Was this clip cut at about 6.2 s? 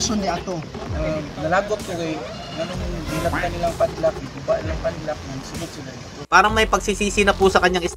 yes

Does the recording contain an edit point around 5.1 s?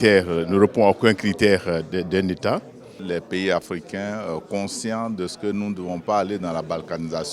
no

